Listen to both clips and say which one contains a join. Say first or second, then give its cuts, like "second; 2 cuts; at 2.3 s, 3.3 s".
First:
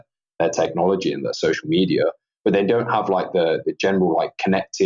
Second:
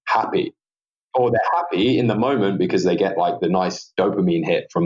second; 1 cut; at 1.0 s